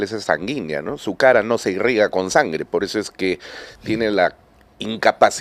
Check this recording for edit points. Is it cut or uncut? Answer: uncut